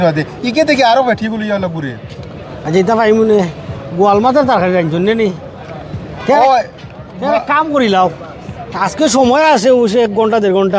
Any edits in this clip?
no; 0 cuts

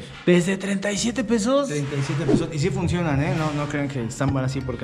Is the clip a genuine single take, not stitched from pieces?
yes; 0 cuts

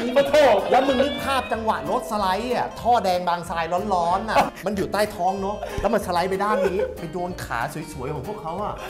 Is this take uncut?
yes; 0 cuts

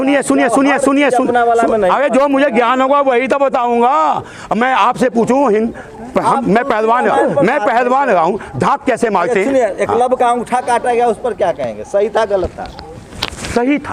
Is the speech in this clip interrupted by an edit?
no; 0 cuts

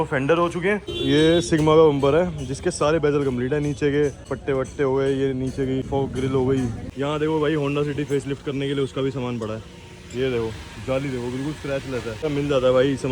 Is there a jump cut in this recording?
yes; 5 cuts; at 0.9 s, 4.3 s, 5.9 s, 6.8 s, 12.2 s

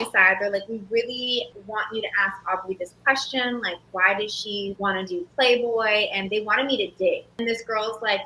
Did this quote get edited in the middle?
yes; 3 cuts; at 1.6 s, 4.8 s, 7.3 s

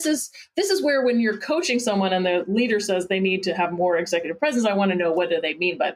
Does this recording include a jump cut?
no; 0 cuts

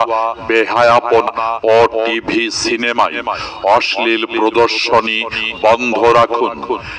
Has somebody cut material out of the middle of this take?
yes; 1 cut; at 1.3 s

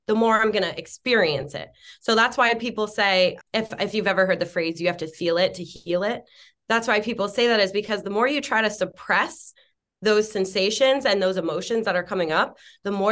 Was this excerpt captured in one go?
no; 1 cut; at 3.4 s

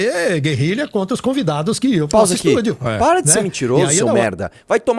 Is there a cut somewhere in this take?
no; 0 cuts

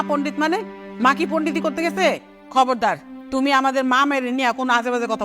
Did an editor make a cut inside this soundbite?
yes; 1 cut; at 3.1 s

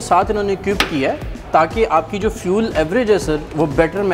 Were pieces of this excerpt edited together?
no; 0 cuts

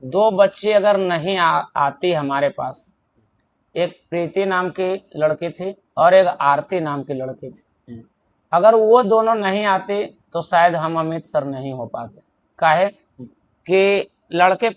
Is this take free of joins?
yes; 0 cuts

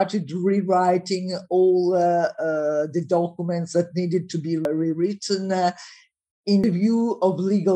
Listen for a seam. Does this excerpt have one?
yes; 2 cuts; at 4.7 s, 6.6 s

